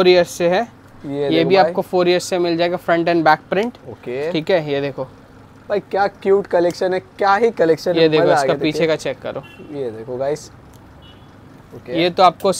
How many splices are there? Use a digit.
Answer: 0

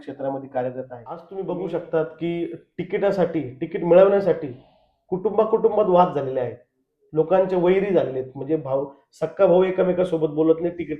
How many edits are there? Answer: 1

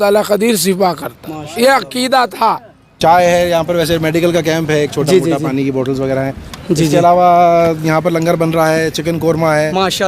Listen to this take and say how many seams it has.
1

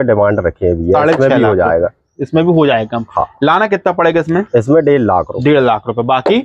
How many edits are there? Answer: 0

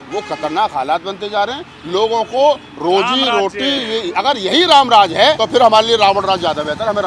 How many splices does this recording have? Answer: 1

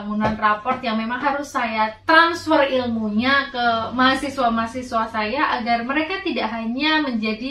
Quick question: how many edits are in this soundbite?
0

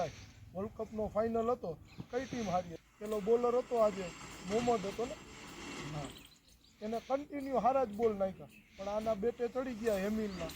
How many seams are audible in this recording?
1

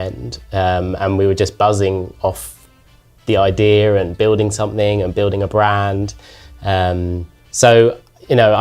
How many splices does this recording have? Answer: 1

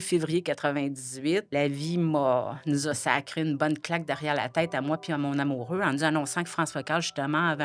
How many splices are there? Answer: 1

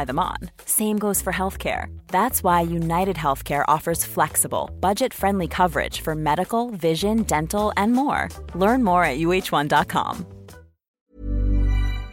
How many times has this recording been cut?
1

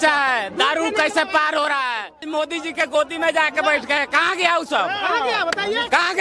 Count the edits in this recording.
1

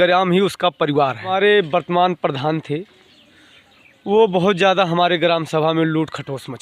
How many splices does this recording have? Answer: 1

